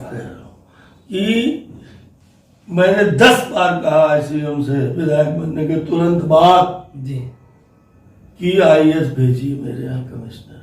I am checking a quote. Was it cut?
no; 0 cuts

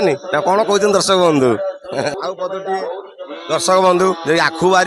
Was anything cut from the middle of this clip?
yes; 1 cut; at 2.2 s

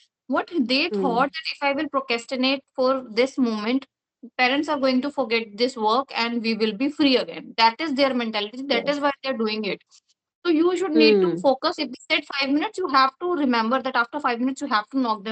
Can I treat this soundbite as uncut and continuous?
yes; 0 cuts

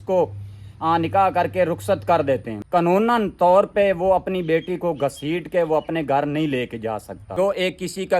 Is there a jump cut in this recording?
yes; 2 cuts; at 2.5 s, 7.2 s

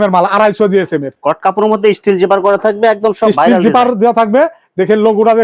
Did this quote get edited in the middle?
yes; 1 cut; at 1.1 s

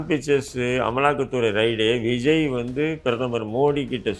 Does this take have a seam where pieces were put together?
no; 0 cuts

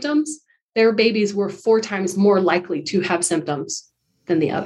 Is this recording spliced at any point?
no; 0 cuts

